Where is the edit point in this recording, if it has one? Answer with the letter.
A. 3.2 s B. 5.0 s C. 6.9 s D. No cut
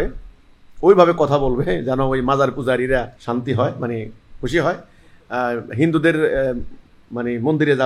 A